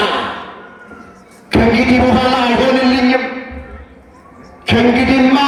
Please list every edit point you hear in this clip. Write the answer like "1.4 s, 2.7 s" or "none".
none